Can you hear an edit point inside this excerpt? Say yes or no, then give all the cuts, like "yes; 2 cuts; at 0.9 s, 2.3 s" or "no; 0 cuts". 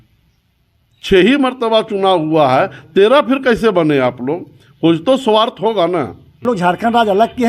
yes; 1 cut; at 6.4 s